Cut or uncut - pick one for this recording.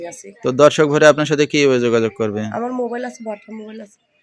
uncut